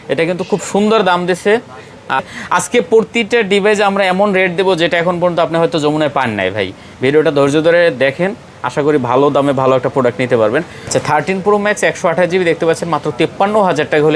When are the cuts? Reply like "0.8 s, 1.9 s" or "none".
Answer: 2.2 s, 10.8 s